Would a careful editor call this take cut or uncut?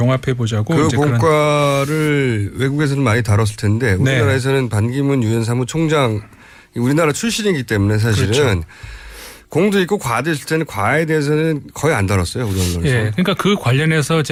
uncut